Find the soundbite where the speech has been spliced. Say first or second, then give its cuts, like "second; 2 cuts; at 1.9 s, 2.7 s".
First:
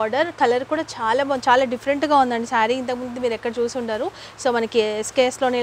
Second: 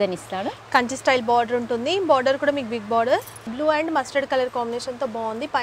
second; 1 cut; at 3.4 s